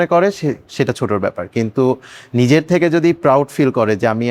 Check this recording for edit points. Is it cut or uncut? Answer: uncut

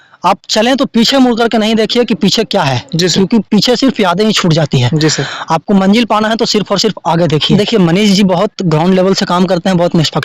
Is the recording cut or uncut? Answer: cut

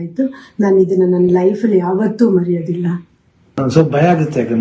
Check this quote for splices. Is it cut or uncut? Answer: cut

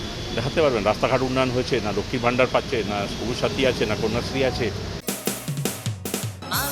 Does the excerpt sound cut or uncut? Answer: cut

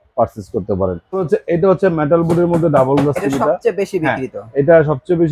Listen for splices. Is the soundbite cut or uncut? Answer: cut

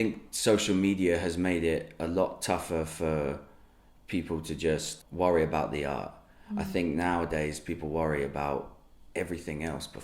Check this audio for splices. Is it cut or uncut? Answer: cut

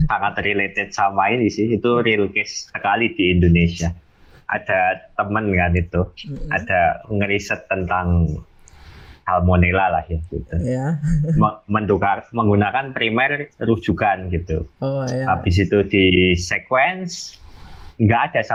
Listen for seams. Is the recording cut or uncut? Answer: uncut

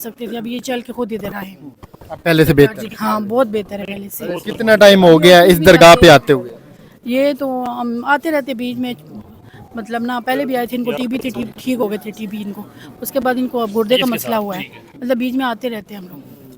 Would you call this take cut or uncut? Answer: uncut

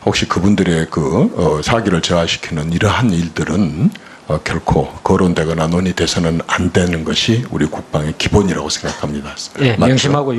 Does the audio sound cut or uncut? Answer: cut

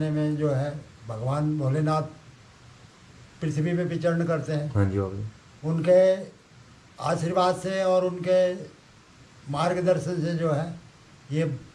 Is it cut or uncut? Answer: uncut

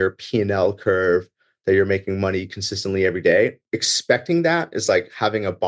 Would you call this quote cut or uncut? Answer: cut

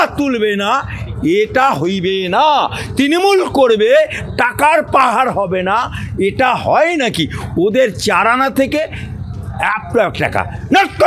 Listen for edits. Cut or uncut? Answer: uncut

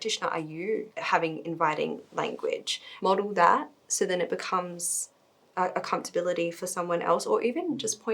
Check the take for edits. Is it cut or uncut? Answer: cut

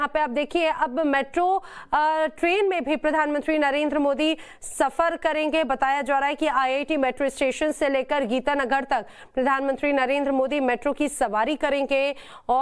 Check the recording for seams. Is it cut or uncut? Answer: uncut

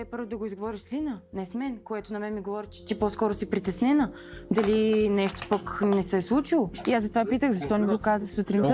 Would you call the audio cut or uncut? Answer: cut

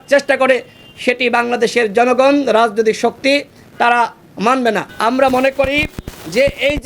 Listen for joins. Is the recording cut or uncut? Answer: cut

